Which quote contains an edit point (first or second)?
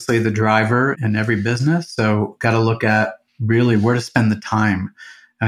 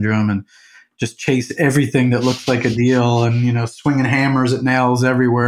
first